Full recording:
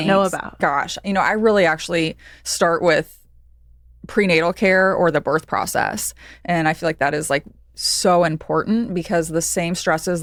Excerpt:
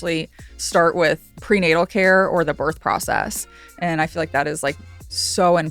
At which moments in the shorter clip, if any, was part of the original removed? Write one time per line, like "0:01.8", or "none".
0:01.3